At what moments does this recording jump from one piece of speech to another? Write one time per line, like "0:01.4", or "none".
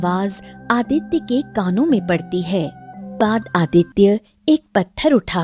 0:03.2